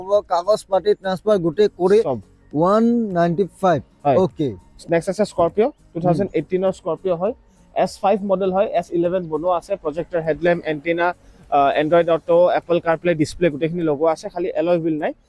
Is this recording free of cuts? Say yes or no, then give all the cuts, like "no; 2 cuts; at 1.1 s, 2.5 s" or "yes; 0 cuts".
yes; 0 cuts